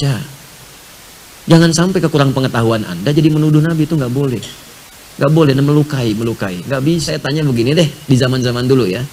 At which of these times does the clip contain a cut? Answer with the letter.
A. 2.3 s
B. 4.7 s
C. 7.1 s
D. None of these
C